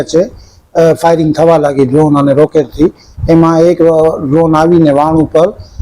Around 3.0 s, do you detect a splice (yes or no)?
no